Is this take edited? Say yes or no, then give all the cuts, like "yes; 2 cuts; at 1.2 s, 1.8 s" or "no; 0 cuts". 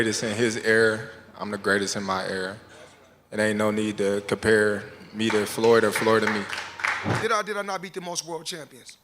yes; 1 cut; at 7.1 s